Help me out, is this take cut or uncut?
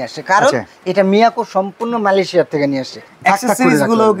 cut